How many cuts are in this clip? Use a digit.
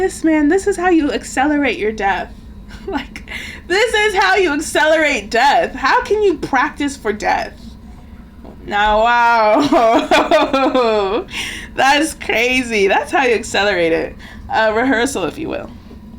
0